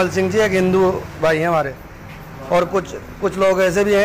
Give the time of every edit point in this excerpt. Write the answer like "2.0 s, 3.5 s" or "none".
none